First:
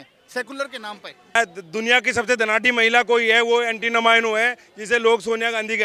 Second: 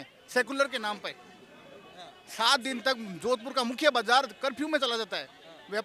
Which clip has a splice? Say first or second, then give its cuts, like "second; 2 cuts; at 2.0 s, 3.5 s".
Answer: first; 1 cut; at 1.4 s